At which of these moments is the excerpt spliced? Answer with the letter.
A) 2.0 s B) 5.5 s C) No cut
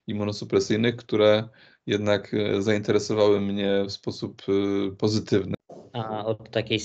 B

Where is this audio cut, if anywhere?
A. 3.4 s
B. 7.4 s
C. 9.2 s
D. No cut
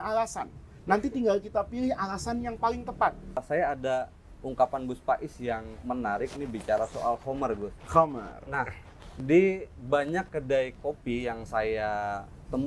A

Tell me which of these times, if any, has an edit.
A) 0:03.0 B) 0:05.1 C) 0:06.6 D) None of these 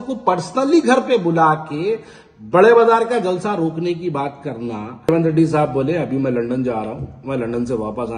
B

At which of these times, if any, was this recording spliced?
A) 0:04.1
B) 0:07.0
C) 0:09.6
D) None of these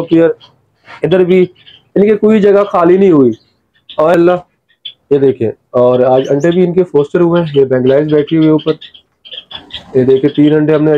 A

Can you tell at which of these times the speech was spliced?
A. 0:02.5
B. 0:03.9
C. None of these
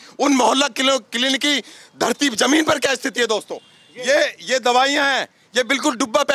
C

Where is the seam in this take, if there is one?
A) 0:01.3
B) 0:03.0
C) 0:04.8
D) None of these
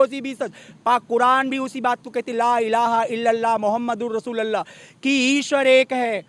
D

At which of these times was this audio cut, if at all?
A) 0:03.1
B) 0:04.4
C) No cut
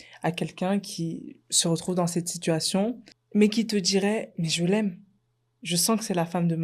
A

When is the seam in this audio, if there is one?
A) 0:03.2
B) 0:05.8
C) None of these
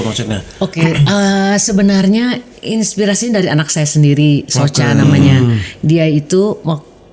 C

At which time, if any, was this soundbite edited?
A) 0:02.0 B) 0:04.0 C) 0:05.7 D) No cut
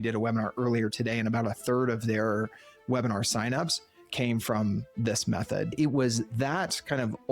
C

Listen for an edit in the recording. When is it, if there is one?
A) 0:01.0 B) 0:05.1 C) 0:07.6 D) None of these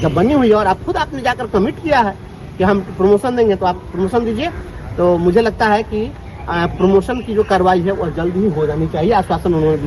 D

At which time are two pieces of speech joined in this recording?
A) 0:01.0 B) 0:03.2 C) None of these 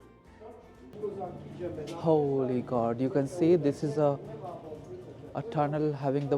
A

